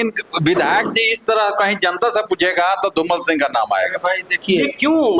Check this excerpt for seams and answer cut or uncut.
uncut